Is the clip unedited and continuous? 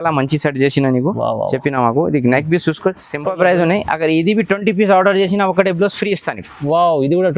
no; 1 cut; at 3.2 s

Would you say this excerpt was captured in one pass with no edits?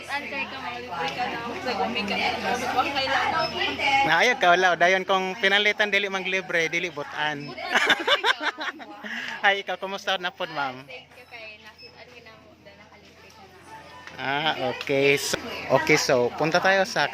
no; 1 cut; at 15.2 s

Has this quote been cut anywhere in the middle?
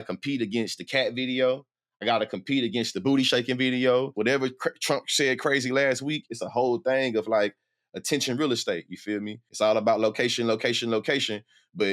yes; 3 cuts; at 4.1 s, 6.4 s, 9.4 s

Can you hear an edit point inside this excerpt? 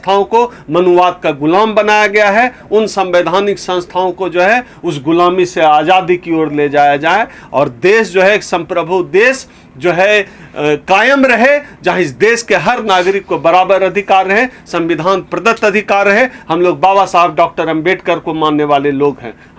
no; 0 cuts

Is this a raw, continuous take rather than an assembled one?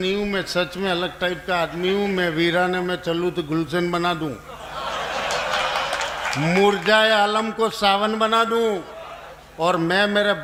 yes; 0 cuts

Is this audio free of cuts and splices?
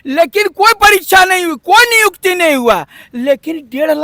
yes; 0 cuts

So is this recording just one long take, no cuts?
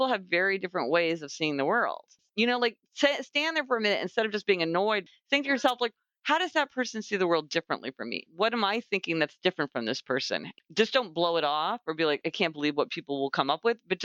no; 5 cuts; at 2.2 s, 5.0 s, 8.2 s, 10.5 s, 12.2 s

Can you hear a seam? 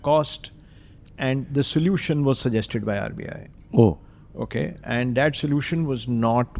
no; 0 cuts

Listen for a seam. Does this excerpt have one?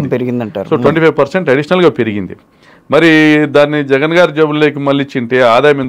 no; 0 cuts

